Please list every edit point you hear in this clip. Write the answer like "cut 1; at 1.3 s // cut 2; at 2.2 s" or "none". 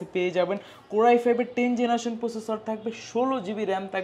none